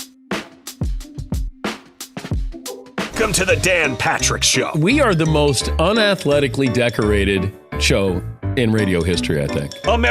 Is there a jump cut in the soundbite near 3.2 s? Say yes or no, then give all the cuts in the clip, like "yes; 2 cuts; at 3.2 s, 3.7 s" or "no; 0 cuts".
yes; 1 cut; at 3.2 s